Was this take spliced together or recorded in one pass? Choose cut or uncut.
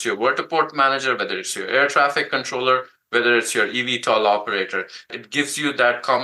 cut